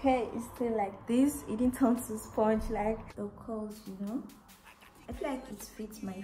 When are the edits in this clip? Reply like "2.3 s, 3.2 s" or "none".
2.8 s